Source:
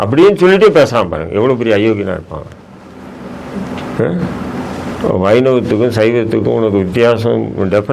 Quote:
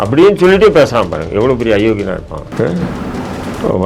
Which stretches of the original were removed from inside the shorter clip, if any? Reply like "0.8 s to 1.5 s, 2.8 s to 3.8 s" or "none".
2.5 s to 3.9 s